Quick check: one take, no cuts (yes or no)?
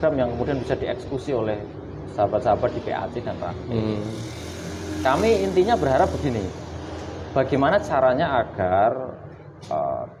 yes